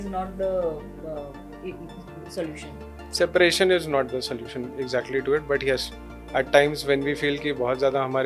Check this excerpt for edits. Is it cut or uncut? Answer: uncut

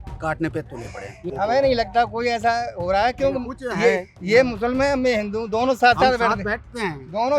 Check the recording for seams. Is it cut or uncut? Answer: cut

